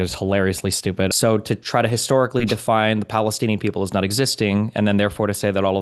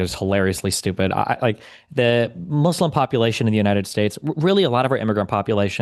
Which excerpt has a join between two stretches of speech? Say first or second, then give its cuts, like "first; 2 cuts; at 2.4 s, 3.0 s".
first; 1 cut; at 1.1 s